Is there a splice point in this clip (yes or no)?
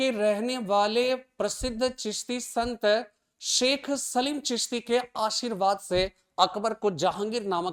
no